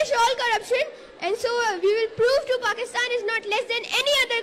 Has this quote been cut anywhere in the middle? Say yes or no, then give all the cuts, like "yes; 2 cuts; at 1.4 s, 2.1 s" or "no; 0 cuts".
no; 0 cuts